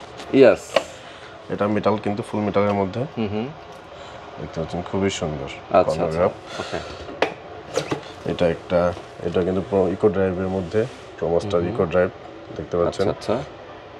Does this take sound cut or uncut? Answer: uncut